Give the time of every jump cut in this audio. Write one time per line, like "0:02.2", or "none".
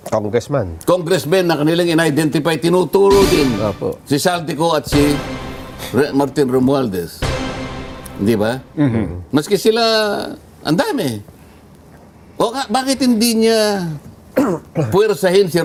none